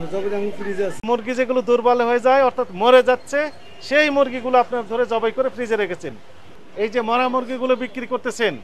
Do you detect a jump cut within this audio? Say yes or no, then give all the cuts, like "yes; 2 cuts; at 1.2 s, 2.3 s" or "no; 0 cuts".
yes; 2 cuts; at 1.0 s, 6.5 s